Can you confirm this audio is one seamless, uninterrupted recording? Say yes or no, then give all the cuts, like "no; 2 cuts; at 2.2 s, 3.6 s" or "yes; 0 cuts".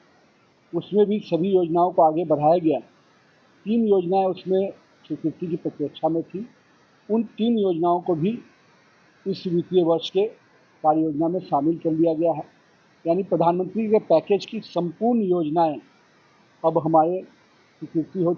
yes; 0 cuts